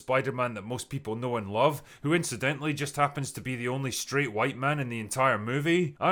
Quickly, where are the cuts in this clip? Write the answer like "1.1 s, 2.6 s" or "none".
none